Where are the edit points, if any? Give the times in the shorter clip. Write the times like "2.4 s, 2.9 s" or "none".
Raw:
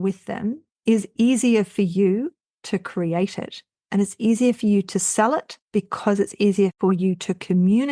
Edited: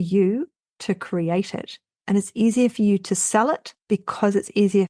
none